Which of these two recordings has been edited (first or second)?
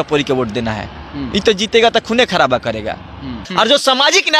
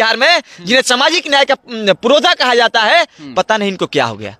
first